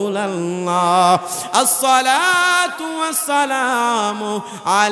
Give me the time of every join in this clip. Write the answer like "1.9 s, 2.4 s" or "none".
none